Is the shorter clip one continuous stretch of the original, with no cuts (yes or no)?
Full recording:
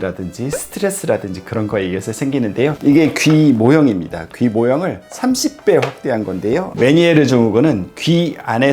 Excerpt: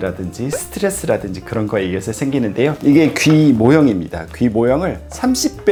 yes